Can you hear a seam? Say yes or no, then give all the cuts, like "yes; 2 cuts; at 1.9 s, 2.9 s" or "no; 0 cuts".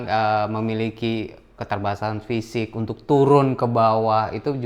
yes; 1 cut; at 1.6 s